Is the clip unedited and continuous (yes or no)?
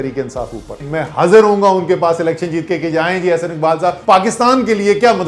no